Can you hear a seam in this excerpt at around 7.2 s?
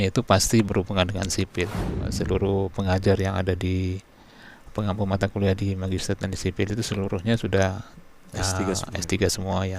no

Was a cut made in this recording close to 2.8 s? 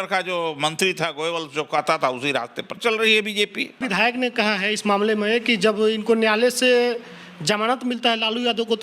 yes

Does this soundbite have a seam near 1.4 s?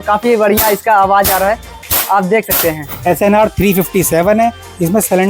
no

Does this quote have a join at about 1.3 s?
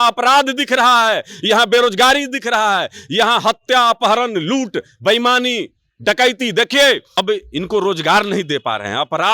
no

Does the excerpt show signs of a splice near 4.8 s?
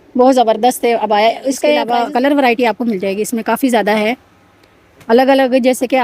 no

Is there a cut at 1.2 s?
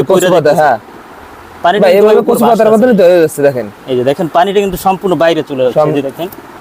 no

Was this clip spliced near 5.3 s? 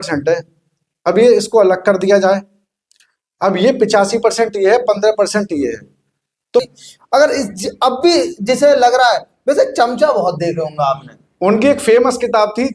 no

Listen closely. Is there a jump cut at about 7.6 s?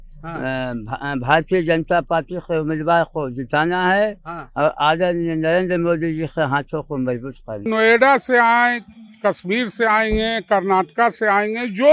yes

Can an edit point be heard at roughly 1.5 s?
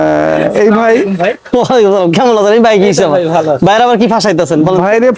no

